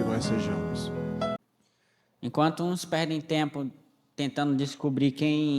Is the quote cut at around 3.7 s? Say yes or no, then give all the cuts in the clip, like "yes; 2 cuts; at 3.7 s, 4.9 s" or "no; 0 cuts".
no; 1 cut; at 1.4 s